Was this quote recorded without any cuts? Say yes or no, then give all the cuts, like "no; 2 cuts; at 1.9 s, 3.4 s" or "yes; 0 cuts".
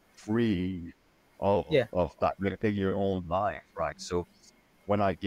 yes; 0 cuts